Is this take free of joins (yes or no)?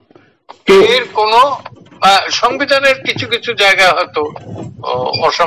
yes